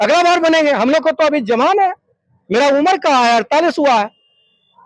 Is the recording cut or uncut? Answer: uncut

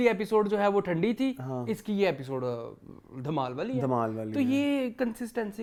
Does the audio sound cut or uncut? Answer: uncut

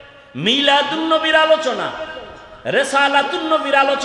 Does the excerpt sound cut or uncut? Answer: uncut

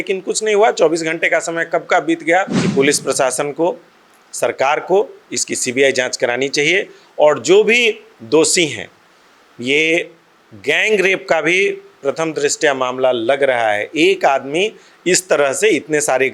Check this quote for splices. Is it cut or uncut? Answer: cut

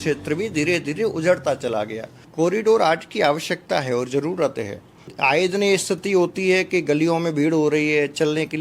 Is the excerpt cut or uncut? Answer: cut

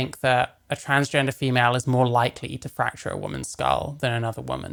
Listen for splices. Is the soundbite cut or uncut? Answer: uncut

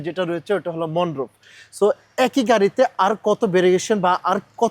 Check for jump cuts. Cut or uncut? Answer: uncut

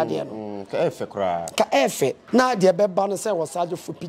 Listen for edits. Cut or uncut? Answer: cut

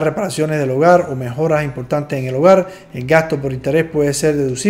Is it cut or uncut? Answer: uncut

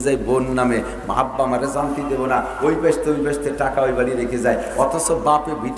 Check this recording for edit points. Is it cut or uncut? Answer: uncut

